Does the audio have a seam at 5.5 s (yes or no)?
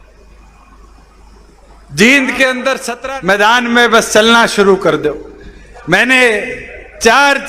no